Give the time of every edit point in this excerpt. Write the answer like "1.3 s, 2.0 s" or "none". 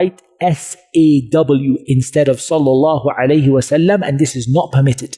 none